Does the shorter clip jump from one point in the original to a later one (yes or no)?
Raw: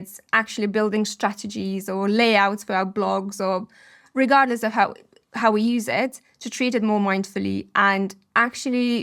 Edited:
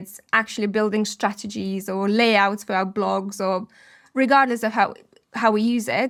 no